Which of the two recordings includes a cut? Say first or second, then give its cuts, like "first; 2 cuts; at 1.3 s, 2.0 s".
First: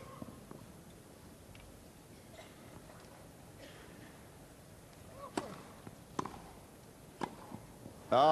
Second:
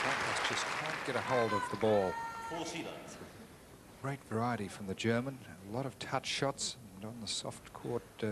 first; 1 cut; at 3.8 s